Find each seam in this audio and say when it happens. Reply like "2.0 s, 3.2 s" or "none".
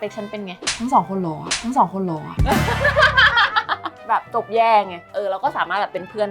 4.0 s